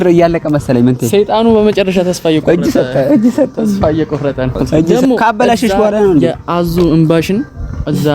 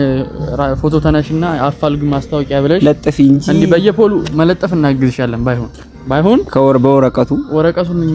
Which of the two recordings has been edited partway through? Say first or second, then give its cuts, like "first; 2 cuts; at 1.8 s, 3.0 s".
first; 1 cut; at 4.9 s